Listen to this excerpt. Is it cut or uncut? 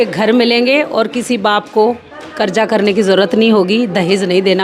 uncut